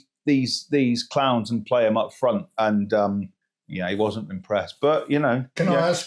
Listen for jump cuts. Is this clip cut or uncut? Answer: uncut